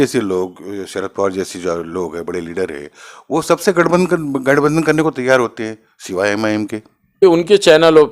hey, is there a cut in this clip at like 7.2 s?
yes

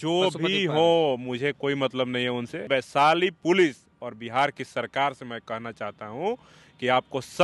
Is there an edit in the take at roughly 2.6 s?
yes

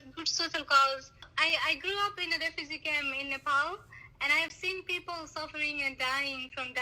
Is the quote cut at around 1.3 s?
yes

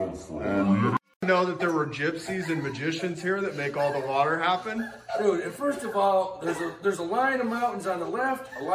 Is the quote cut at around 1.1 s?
yes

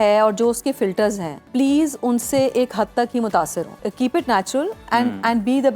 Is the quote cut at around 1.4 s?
yes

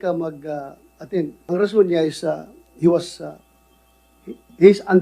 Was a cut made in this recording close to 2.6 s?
no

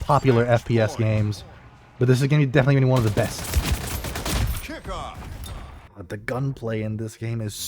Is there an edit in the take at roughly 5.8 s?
yes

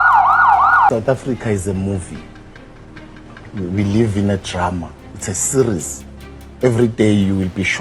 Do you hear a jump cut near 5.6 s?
no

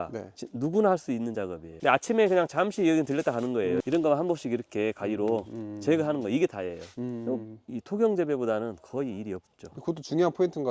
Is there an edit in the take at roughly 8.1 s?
no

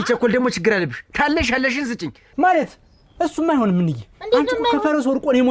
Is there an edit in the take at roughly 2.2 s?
yes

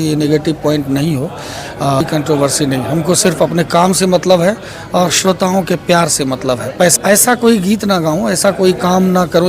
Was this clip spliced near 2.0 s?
yes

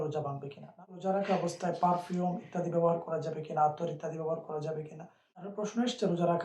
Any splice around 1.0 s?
yes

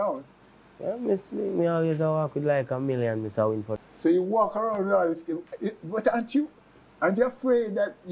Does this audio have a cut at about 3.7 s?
yes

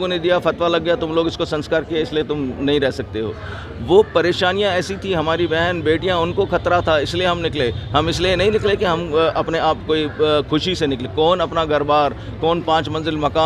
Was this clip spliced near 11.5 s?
no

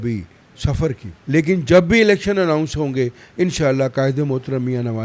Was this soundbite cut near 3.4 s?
no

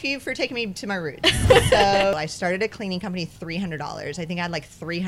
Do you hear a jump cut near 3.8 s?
no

